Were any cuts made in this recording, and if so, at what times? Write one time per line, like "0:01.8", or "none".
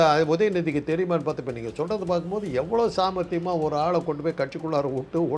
none